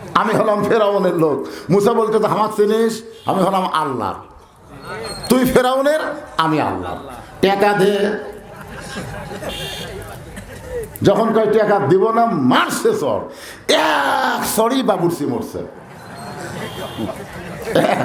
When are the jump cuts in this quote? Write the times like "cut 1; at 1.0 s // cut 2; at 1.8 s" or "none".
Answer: none